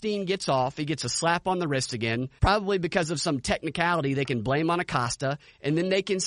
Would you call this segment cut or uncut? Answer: cut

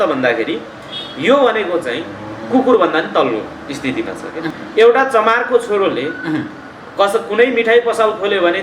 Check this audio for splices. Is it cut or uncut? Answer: cut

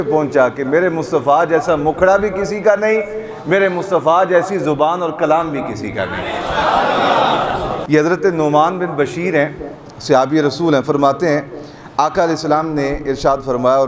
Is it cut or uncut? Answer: uncut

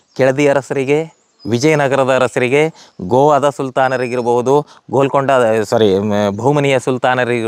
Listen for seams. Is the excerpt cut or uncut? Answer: uncut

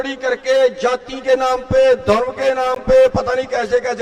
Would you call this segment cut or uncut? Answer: uncut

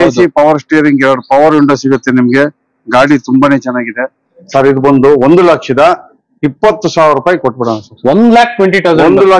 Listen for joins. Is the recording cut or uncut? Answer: cut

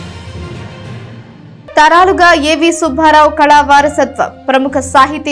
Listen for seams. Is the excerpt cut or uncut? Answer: cut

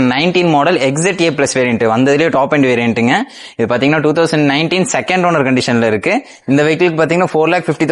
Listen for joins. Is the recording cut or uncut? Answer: uncut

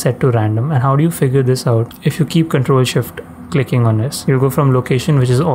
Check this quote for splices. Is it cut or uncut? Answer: uncut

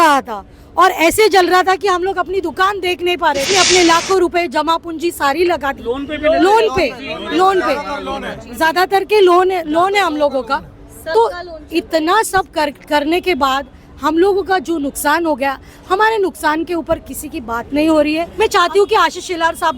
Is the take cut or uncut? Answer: cut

